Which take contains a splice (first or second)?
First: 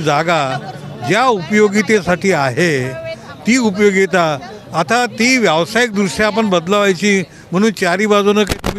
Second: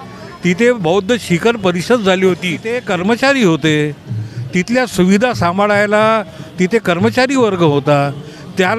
second